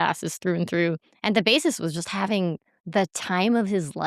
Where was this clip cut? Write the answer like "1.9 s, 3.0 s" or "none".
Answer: 1.1 s, 2.7 s